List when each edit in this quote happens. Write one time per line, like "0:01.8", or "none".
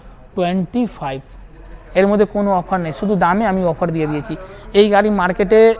none